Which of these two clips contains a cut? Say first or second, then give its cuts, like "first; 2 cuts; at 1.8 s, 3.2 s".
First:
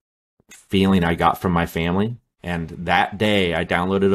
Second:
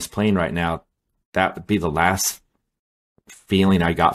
first; 1 cut; at 2.3 s